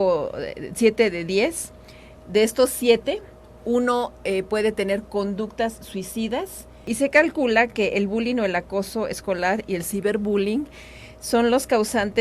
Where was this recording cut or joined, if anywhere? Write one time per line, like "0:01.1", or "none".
0:06.9